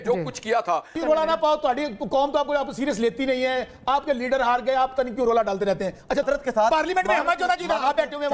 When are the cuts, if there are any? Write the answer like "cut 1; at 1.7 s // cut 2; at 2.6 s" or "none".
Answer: cut 1; at 0.9 s // cut 2; at 6.2 s